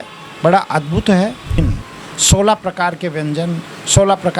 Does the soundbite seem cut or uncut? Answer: cut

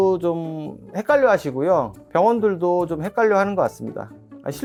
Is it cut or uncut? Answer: uncut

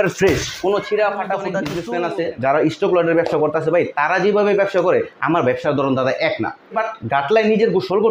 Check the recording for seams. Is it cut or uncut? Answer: cut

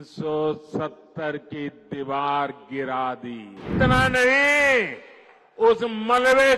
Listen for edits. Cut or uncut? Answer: cut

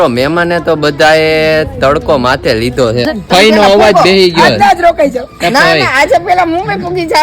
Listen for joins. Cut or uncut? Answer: cut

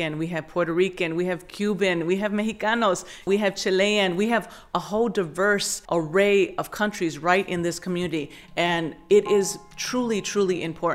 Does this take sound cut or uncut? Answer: cut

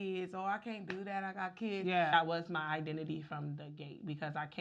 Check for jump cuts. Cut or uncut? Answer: cut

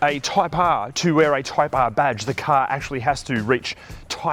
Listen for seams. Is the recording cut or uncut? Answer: uncut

